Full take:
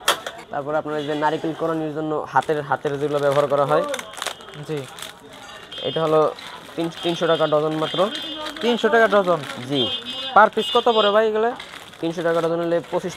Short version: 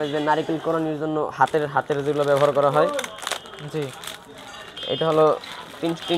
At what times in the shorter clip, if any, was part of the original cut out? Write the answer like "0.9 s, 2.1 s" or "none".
none

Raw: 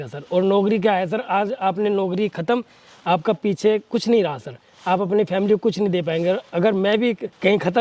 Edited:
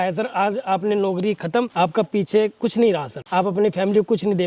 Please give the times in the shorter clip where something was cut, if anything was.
1.7 s, 3.1 s

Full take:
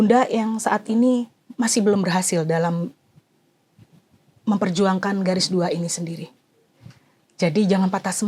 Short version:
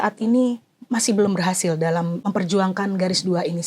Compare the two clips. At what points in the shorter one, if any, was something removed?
2.3 s

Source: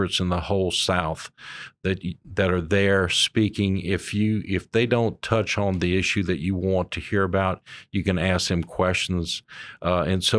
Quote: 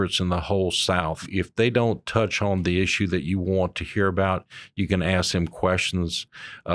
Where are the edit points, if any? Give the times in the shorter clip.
1.3 s

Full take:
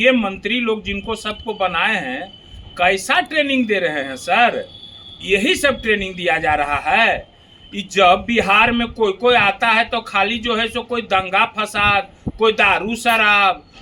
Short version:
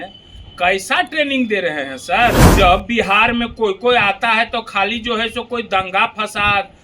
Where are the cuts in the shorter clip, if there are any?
2.5 s

